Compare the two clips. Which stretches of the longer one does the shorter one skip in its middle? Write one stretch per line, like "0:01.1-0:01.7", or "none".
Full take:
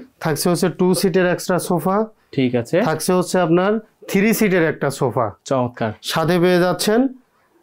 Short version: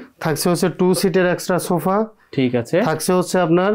none